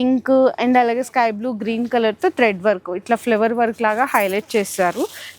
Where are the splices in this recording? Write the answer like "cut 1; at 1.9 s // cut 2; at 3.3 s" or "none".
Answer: none